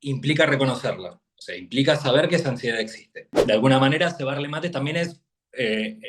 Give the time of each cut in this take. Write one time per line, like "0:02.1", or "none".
0:03.3